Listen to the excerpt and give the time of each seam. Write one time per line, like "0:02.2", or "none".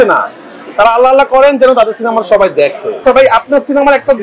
0:03.0

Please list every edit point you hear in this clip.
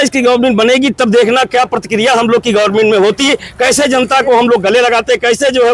none

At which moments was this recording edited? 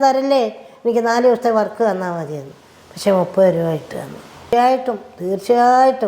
0:04.4

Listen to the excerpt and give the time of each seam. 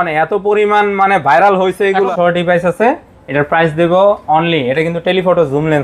0:02.1

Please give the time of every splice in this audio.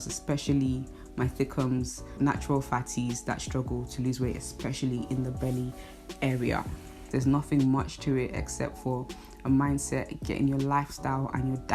0:07.0

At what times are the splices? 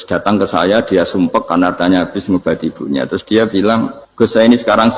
0:04.0

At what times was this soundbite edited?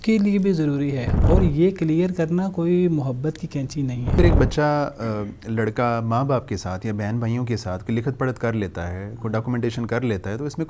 0:01.1
0:04.2

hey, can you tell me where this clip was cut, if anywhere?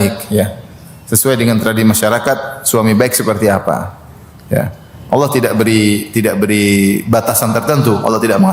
none

